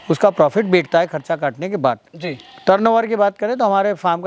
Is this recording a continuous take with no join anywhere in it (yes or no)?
yes